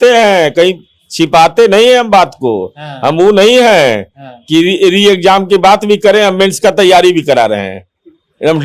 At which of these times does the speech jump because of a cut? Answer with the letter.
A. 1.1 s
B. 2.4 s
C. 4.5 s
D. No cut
D